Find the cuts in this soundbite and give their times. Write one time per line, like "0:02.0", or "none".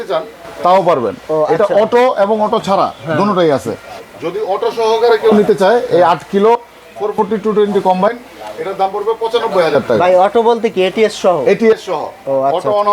none